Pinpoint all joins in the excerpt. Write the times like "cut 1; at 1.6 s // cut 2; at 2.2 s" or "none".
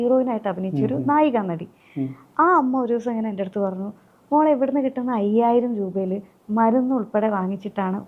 none